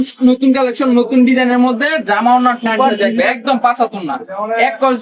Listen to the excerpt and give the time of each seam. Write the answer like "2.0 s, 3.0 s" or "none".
2.9 s